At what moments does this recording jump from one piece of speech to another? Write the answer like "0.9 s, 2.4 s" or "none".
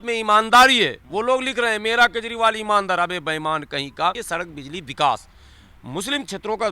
4.2 s